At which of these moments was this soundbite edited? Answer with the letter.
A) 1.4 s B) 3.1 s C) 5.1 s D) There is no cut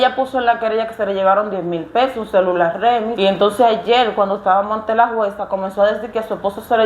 B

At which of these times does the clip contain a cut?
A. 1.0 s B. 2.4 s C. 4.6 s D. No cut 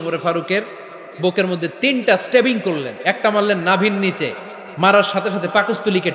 D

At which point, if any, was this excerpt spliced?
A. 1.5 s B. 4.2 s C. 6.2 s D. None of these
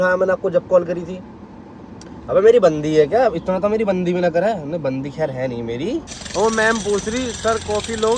C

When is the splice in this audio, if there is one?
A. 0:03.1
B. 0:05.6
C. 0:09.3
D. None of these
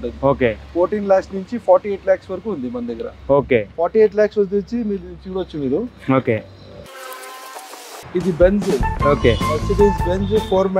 D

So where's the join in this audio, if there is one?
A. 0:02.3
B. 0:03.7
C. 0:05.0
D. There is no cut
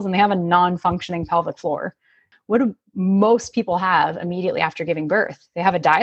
A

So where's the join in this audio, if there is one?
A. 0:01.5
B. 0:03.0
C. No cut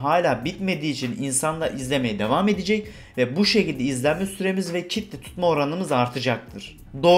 C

